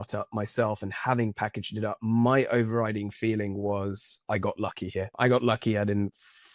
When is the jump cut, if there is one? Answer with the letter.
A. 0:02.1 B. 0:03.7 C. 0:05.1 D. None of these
C